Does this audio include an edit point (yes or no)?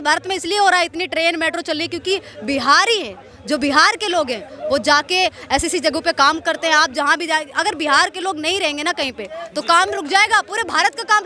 no